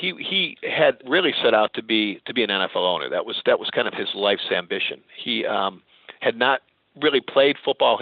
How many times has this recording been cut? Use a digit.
1